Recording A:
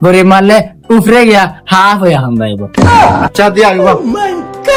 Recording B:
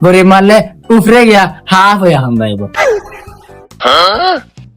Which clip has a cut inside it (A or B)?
B